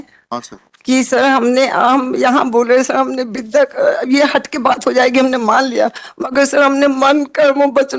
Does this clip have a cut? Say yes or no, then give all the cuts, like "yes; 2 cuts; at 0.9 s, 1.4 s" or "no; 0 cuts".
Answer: no; 0 cuts